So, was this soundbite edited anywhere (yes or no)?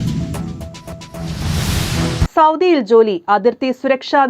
yes